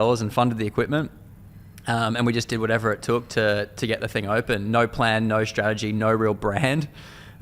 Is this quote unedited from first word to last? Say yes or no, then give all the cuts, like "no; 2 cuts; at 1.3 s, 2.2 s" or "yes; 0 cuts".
yes; 0 cuts